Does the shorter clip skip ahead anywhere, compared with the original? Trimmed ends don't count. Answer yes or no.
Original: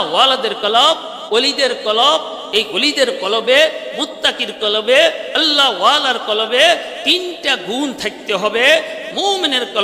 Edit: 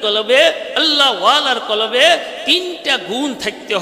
no